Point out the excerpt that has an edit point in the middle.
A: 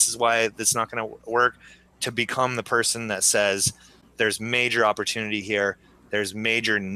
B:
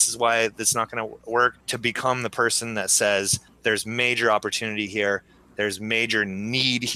B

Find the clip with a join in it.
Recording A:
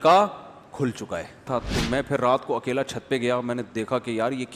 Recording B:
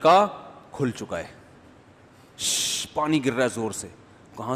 A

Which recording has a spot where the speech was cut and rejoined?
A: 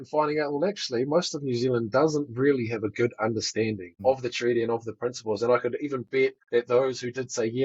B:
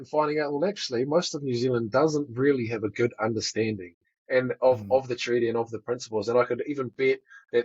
A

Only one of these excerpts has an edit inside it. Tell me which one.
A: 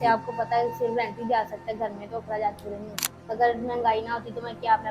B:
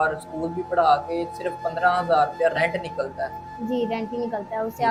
A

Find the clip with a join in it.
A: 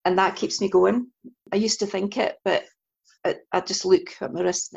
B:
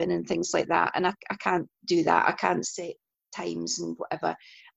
A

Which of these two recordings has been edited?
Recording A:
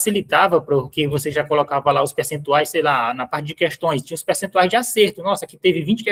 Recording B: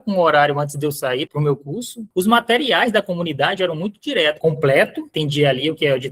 B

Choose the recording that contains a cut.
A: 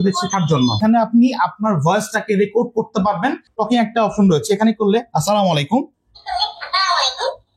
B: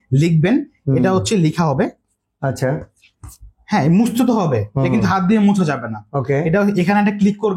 A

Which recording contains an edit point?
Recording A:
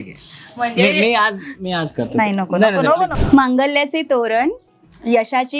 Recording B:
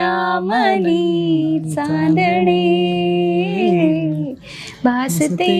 A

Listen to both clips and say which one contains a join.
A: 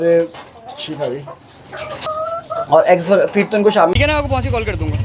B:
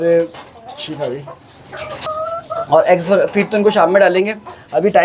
A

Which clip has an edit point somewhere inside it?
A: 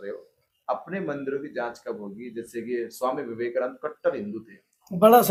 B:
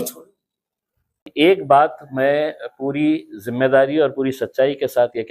B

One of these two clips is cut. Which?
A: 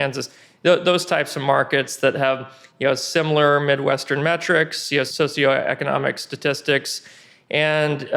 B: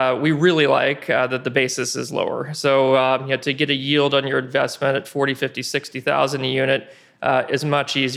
A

